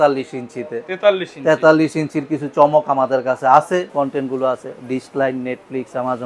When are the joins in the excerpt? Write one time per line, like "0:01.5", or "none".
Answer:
0:03.9